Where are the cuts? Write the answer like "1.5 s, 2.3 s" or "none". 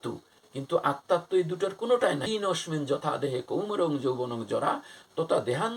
2.3 s